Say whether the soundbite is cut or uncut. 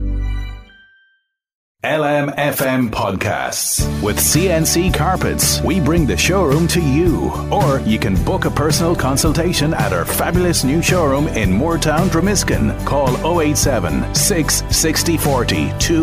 cut